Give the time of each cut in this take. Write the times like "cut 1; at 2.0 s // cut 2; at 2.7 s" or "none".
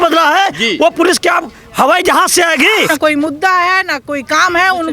cut 1; at 2.9 s